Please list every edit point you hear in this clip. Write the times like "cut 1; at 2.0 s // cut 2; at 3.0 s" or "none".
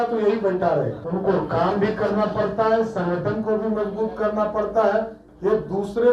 cut 1; at 1.0 s // cut 2; at 5.2 s